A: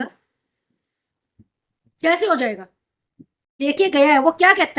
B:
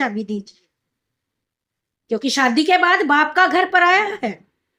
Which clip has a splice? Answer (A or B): A